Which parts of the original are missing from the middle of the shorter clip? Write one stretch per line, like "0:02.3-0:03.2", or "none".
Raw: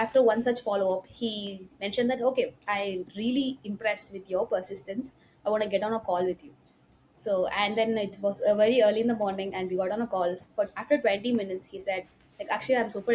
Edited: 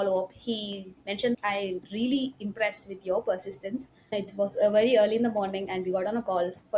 0:02.1-0:02.6
0:05.4-0:08.0